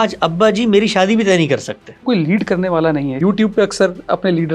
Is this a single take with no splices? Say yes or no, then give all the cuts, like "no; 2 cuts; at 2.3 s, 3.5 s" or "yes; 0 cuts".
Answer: no; 2 cuts; at 2.0 s, 3.2 s